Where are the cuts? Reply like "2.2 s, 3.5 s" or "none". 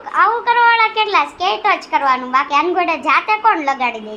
none